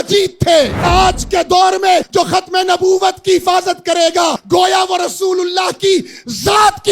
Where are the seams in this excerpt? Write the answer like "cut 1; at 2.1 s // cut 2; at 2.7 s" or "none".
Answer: cut 1; at 0.9 s // cut 2; at 2.1 s // cut 3; at 4.4 s